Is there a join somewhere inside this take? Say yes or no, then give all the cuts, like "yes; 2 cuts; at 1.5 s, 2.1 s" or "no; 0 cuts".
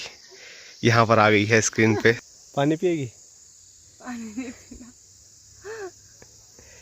yes; 1 cut; at 2.3 s